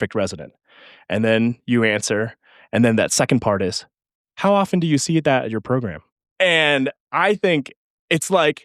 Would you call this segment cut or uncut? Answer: cut